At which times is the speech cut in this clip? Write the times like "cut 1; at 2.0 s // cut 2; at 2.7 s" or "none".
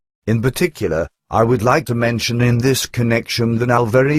none